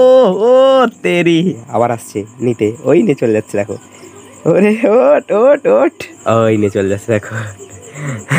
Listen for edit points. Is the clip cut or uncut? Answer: cut